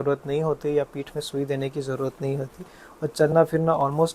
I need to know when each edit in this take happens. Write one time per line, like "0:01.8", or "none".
none